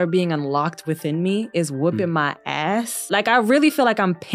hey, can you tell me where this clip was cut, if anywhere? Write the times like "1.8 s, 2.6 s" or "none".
3.0 s